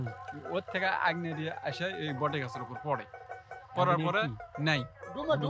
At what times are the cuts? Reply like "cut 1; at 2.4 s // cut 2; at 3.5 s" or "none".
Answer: none